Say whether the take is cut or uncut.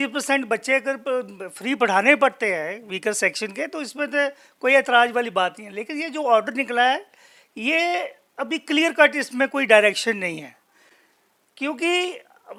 uncut